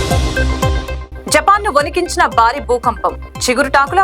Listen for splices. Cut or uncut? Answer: cut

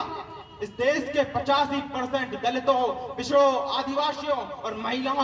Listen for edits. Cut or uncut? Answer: uncut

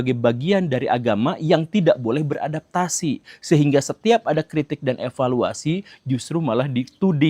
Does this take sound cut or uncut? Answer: uncut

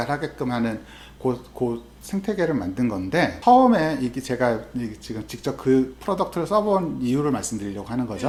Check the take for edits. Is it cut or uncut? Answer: uncut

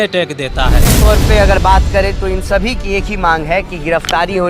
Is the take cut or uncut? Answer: cut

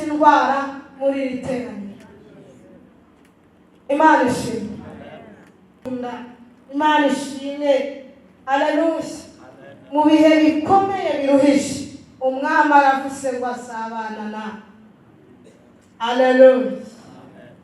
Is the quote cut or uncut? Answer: cut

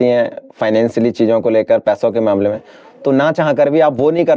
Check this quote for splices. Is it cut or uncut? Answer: uncut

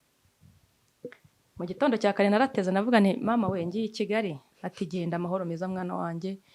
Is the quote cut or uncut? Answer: uncut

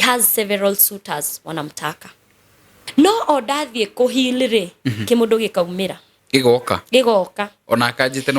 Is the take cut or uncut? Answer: cut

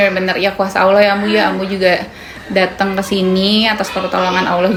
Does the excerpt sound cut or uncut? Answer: uncut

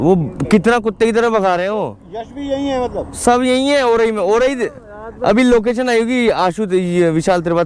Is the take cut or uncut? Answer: uncut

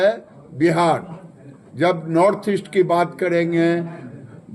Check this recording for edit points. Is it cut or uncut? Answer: uncut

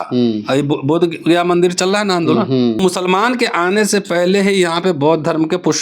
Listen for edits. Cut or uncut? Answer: cut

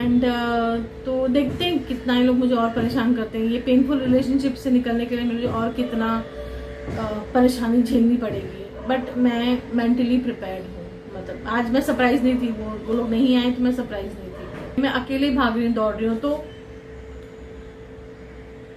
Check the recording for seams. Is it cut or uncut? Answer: cut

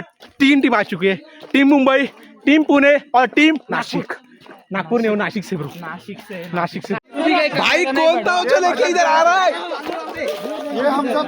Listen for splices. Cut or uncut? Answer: cut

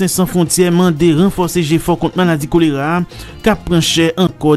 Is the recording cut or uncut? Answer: uncut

